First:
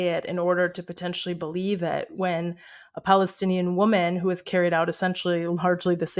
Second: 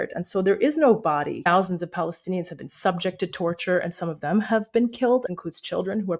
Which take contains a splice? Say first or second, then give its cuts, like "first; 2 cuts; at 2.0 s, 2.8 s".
second; 2 cuts; at 1.5 s, 5.2 s